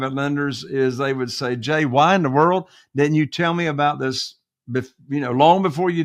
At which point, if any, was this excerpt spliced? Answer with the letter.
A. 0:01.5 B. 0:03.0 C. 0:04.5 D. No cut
D